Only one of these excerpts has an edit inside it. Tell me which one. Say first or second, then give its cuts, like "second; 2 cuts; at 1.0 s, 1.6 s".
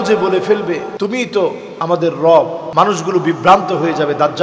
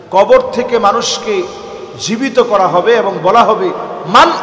first; 3 cuts; at 0.9 s, 1.7 s, 2.6 s